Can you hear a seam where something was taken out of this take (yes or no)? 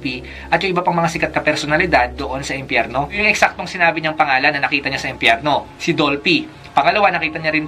yes